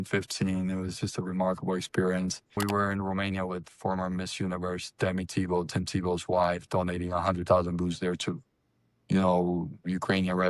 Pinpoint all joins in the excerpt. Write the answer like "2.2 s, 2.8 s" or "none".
2.6 s